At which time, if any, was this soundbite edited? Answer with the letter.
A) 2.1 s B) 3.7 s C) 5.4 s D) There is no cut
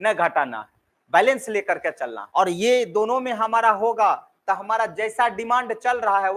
A